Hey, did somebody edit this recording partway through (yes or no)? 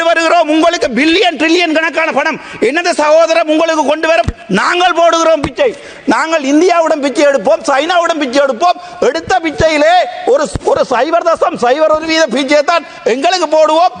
no